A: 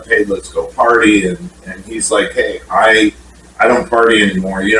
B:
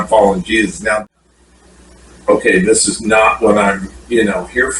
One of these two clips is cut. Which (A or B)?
B